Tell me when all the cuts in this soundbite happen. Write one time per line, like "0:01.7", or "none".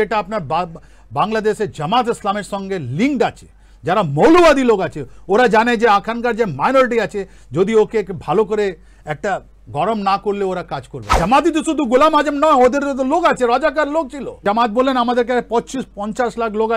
0:11.0
0:14.4